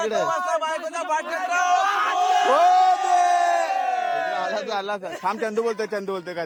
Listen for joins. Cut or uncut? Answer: uncut